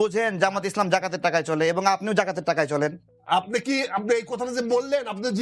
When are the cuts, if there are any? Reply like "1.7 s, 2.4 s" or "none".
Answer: 3.1 s